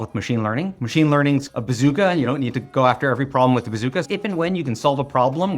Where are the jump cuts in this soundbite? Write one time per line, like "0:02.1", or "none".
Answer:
0:01.5
0:04.1